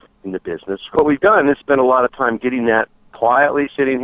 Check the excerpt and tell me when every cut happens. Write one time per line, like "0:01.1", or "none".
0:01.0
0:03.0